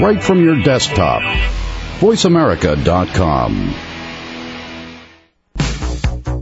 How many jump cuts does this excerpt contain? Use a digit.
1